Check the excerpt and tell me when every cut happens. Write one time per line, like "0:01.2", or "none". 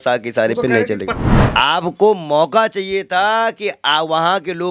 0:01.2

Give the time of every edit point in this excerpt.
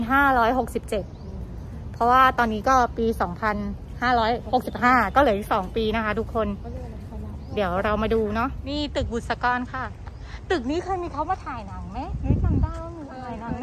none

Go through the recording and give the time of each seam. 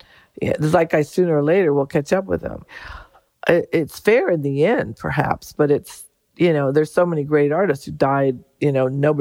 none

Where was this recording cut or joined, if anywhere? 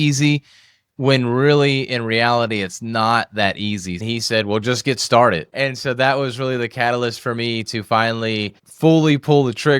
0:04.0

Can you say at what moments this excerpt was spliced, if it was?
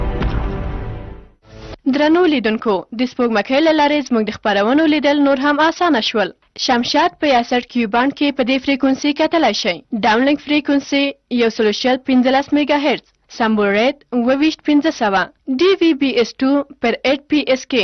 0:01.7

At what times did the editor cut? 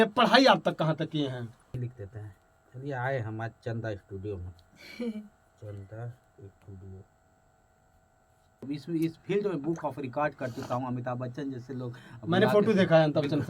0:01.7
0:08.6

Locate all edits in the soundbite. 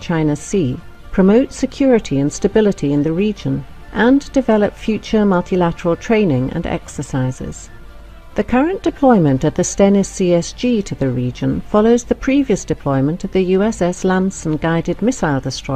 none

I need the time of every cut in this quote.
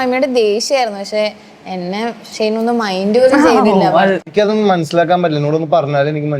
0:04.3

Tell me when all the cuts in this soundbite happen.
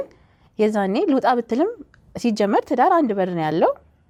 none

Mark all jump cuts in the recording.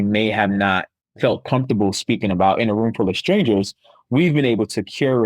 0:01.0

